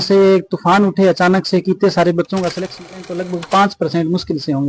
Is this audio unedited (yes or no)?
no